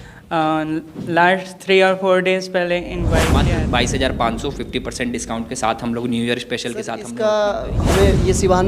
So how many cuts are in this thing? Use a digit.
2